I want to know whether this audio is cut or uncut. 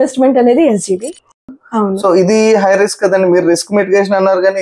cut